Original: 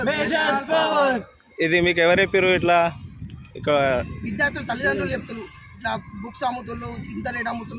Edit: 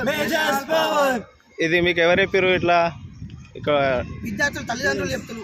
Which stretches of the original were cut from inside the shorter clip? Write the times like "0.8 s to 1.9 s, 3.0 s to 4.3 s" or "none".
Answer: none